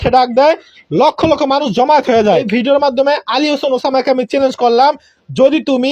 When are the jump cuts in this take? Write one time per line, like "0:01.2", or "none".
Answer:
0:02.4